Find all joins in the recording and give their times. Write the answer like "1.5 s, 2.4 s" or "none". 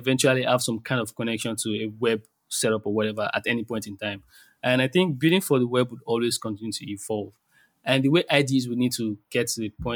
none